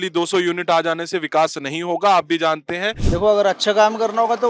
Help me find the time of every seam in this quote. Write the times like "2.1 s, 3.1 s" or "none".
3.0 s

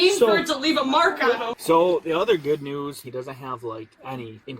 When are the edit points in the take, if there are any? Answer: 1.4 s, 3.0 s

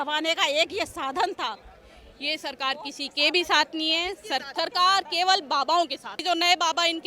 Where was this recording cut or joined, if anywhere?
1.7 s, 4.5 s, 6.2 s

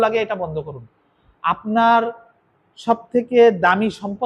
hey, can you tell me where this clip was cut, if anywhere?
none

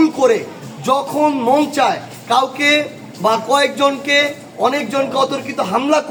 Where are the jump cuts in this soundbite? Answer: none

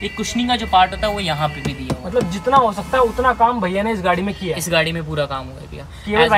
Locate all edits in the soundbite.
none

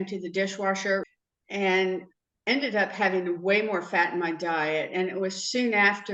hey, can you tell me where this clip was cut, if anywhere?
1.1 s

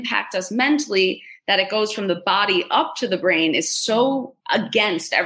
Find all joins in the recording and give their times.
4.3 s

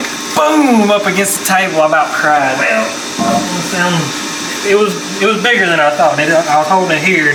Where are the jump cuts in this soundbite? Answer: none

